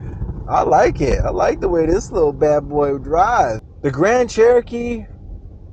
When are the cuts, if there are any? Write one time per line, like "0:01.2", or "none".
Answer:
0:03.6